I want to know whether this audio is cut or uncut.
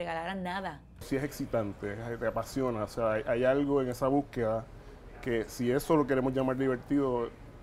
cut